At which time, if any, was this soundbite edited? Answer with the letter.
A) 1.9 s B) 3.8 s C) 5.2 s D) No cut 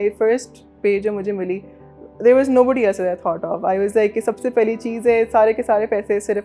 D